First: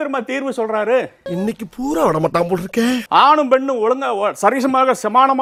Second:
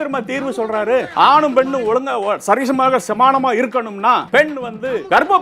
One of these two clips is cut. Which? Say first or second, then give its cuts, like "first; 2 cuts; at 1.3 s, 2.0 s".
second; 2 cuts; at 1.1 s, 4.5 s